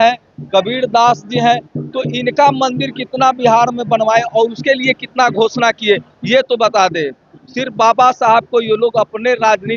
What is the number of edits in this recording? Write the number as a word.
zero